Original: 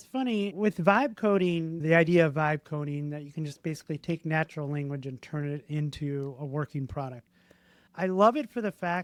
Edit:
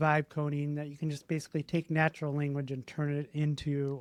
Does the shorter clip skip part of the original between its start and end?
no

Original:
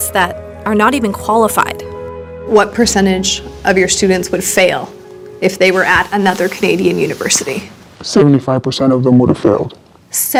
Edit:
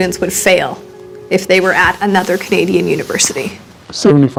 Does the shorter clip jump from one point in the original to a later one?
no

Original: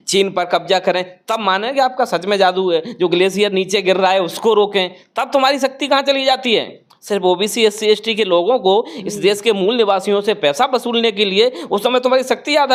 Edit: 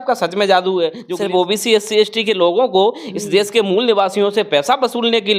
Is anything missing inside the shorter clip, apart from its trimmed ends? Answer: yes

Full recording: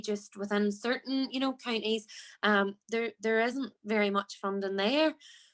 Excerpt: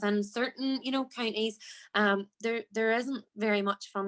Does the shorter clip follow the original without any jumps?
yes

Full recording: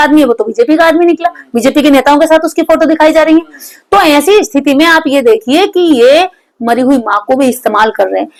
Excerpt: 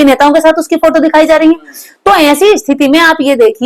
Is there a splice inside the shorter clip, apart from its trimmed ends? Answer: no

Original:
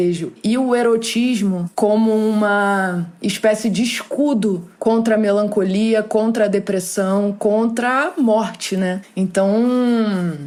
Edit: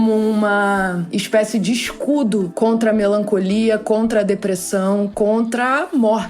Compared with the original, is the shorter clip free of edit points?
no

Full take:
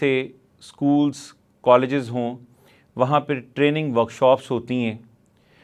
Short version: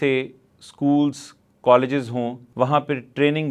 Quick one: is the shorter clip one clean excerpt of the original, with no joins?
no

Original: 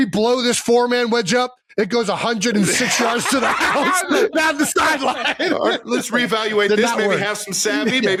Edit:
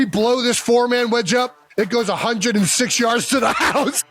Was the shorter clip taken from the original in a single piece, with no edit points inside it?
yes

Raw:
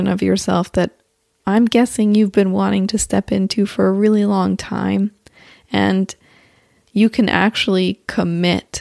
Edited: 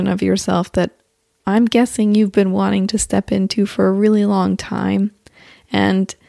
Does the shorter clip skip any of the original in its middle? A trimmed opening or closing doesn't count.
no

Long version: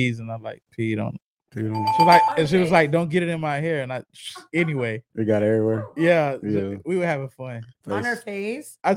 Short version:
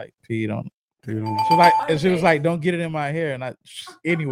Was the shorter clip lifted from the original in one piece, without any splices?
yes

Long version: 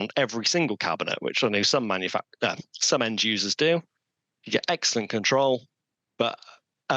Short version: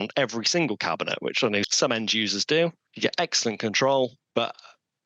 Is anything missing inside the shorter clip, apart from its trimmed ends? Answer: yes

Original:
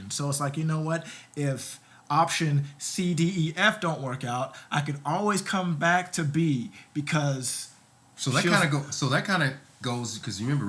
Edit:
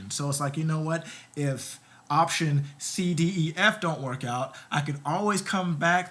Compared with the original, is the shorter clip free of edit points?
yes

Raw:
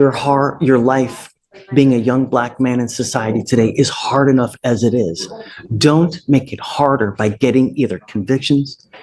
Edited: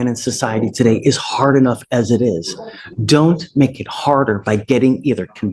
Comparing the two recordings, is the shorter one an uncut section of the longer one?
yes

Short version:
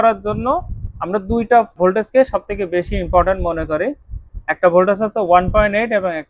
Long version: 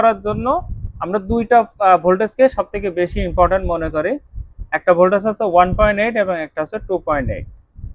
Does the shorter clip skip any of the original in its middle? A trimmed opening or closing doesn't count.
yes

